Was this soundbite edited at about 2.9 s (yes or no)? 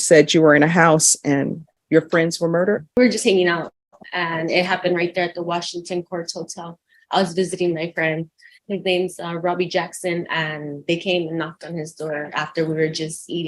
yes